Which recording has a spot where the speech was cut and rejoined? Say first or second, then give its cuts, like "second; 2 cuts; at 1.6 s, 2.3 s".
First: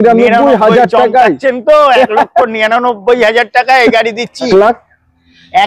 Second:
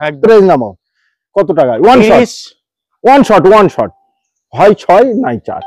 first; 1 cut; at 4.5 s